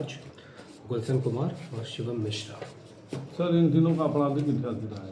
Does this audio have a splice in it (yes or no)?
no